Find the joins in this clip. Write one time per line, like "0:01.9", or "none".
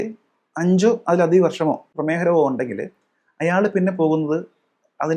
0:02.0